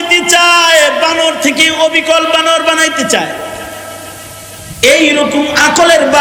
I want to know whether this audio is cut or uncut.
uncut